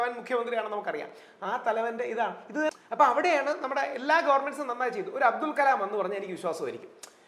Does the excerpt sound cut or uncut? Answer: cut